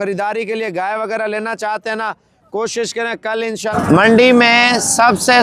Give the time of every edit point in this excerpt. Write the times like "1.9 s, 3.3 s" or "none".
3.7 s

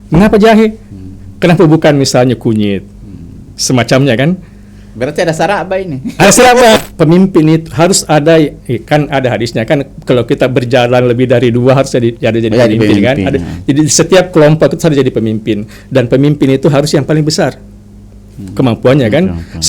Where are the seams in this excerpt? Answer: 6.8 s

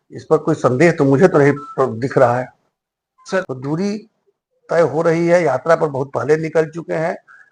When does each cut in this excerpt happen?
3.5 s

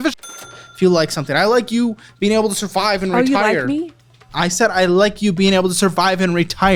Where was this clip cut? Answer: none

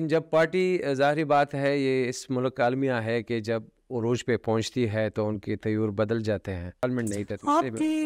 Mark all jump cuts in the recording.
6.8 s

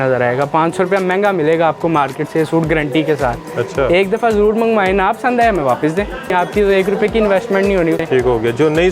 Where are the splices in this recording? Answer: 6.3 s, 8.0 s

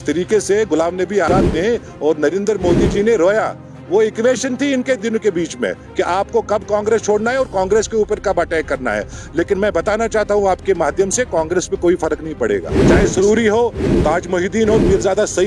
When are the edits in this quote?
1.3 s, 12.7 s

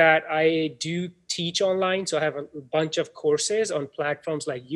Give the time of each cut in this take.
none

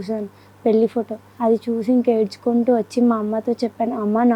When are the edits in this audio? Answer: 1.2 s

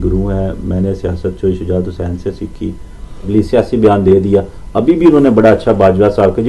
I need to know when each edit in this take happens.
3.3 s

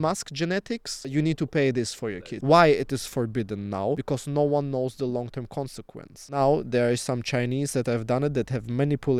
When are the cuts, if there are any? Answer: 1.1 s, 2.3 s, 4.0 s, 6.3 s

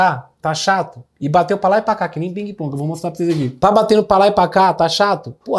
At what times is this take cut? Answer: none

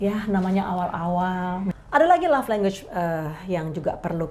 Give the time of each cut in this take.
1.8 s

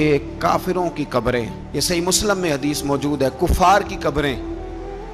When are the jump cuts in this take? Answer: none

